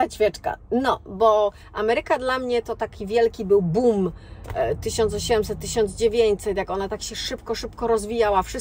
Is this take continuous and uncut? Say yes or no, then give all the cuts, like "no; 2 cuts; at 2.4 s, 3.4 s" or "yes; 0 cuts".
yes; 0 cuts